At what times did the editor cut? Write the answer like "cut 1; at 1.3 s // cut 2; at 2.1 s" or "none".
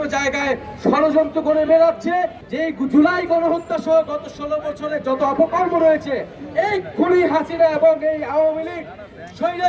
cut 1; at 2.4 s